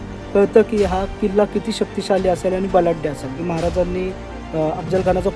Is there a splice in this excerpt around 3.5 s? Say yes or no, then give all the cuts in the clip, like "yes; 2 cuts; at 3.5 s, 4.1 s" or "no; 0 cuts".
yes; 1 cut; at 3.5 s